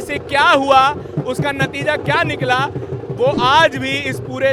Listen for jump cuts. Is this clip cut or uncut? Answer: uncut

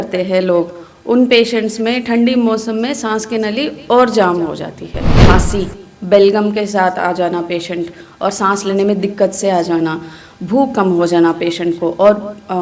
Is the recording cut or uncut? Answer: cut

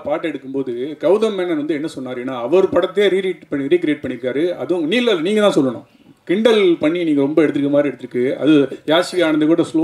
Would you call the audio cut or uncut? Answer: uncut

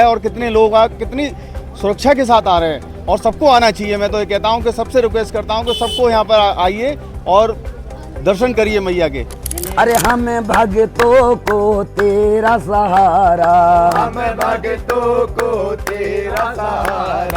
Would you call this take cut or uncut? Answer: cut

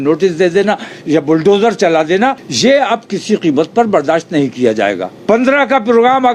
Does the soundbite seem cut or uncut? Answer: cut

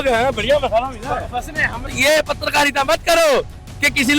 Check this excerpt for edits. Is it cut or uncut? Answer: cut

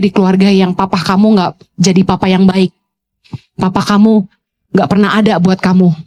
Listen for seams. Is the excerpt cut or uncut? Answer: uncut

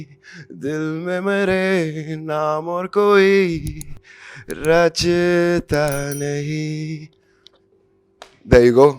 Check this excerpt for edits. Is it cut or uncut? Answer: uncut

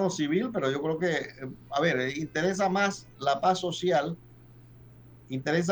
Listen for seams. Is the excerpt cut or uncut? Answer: uncut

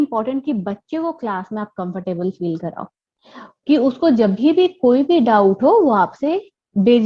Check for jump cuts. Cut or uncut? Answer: uncut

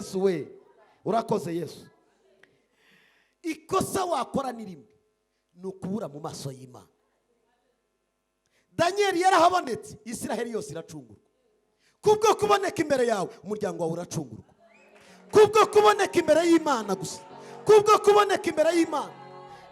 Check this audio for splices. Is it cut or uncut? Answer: cut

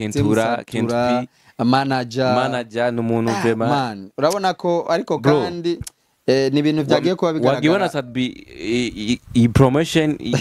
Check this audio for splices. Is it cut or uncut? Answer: uncut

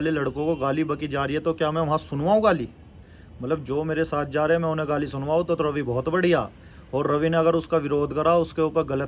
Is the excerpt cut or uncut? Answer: uncut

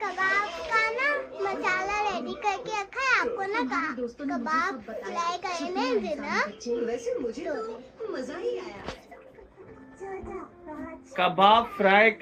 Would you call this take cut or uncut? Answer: uncut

